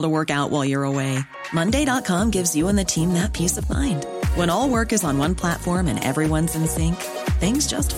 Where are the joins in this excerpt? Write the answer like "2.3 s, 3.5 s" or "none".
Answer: none